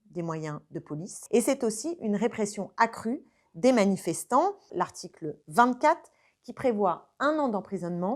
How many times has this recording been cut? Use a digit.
2